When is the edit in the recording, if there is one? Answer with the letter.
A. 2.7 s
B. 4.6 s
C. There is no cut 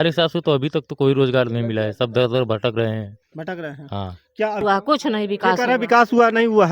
B